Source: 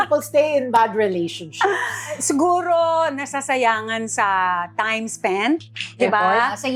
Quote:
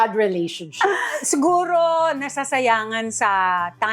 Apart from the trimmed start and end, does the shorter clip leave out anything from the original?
yes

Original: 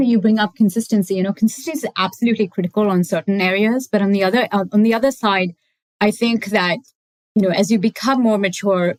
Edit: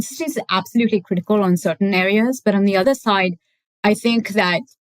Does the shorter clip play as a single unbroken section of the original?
no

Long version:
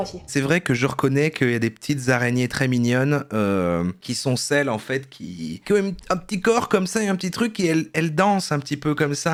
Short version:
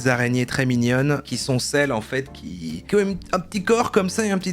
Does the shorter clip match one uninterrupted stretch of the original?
no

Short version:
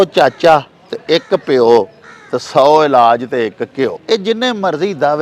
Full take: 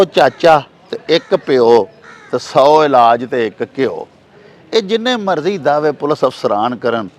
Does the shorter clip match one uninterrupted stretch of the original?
no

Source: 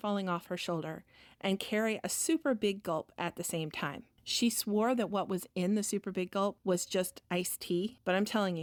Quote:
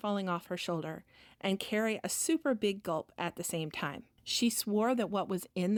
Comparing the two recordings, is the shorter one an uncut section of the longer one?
yes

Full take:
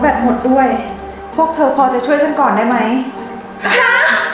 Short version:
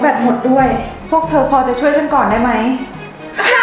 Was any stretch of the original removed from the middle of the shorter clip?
yes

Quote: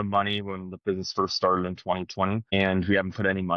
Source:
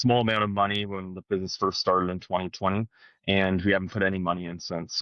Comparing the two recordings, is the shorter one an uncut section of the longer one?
no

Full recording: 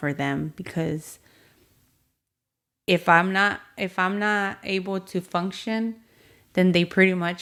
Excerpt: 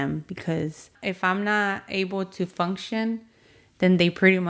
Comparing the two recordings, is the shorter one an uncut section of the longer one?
no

